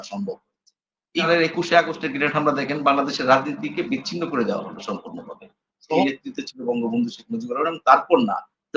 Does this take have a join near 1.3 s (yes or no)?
yes